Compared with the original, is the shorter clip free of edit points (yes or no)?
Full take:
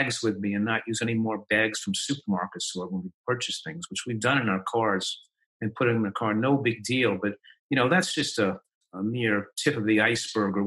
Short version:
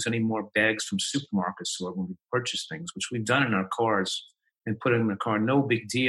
yes